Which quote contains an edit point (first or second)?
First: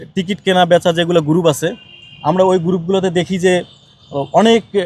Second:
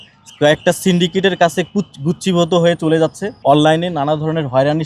second